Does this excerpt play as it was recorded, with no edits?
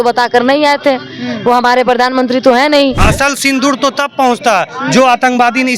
no; 1 cut; at 3.1 s

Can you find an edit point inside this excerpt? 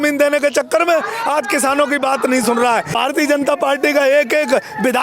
yes; 1 cut; at 2.9 s

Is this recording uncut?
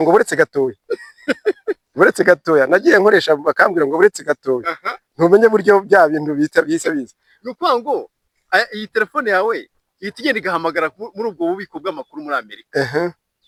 yes; 0 cuts

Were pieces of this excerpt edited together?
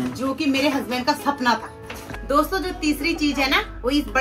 yes; 1 cut; at 2.1 s

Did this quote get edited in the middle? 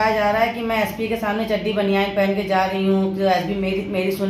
no; 0 cuts

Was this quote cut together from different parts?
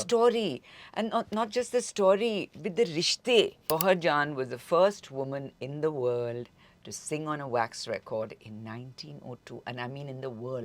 yes; 1 cut; at 3.7 s

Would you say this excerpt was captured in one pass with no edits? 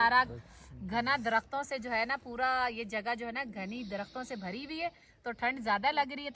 yes; 0 cuts

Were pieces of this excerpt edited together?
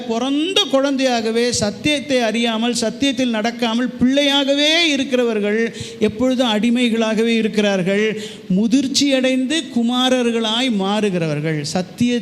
no; 0 cuts

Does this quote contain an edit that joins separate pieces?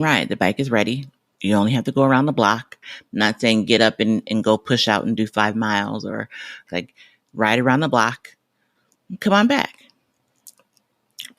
yes; 2 cuts; at 2.8 s, 6.7 s

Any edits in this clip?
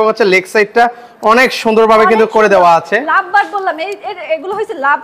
no; 0 cuts

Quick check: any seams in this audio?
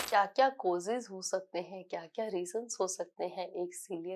no; 0 cuts

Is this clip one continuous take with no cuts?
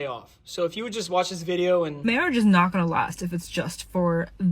no; 1 cut; at 2.0 s

